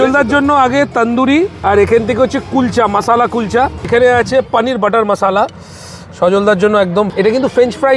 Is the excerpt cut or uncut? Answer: cut